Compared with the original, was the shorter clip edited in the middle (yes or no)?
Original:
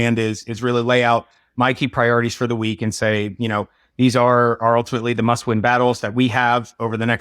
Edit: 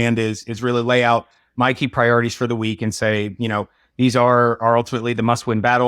no